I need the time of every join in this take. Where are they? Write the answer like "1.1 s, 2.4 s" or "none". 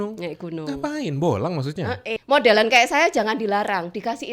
2.2 s